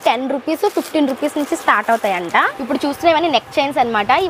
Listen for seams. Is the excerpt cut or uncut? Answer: cut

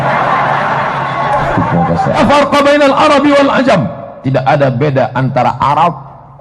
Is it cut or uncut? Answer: cut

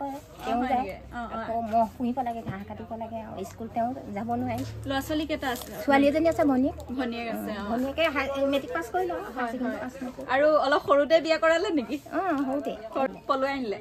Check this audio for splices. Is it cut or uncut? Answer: uncut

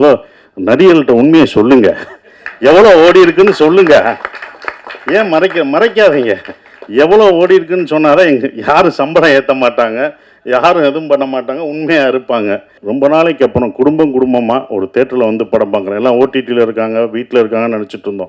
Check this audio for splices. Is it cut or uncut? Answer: cut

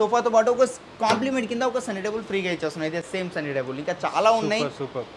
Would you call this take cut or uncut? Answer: uncut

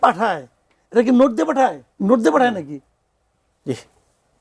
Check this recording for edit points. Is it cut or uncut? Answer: cut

